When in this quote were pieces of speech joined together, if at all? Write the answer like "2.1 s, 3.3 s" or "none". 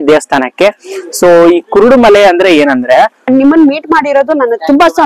3.3 s